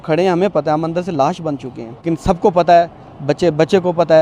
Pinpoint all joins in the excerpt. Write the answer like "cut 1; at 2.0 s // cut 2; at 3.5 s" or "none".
cut 1; at 2.0 s